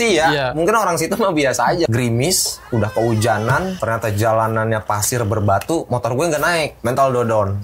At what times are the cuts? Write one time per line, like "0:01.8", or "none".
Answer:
0:01.9
0:03.8
0:06.8

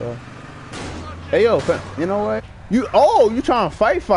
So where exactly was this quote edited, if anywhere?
0:02.5

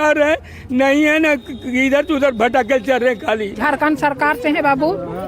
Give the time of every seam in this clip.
0:03.5

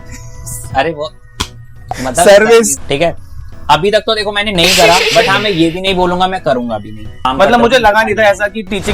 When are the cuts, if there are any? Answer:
0:02.8
0:07.3

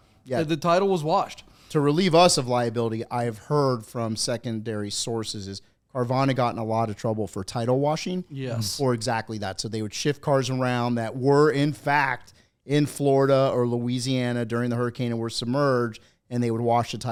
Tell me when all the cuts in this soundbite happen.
none

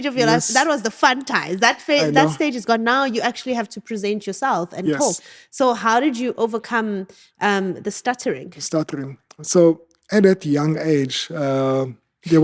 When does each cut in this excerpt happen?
none

